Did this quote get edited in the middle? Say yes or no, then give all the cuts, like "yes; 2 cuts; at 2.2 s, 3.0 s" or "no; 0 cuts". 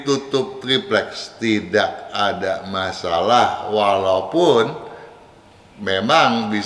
no; 0 cuts